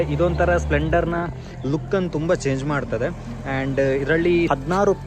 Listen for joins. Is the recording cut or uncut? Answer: uncut